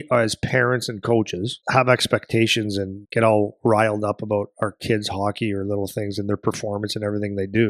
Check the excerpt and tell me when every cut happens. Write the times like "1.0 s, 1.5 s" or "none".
1.6 s, 3.0 s

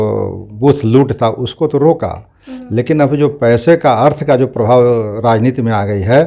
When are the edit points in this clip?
none

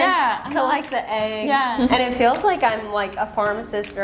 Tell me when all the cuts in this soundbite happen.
1.8 s

